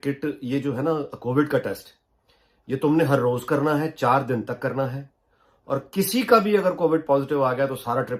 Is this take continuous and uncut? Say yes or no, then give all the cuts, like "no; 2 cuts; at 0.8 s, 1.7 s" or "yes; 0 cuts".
yes; 0 cuts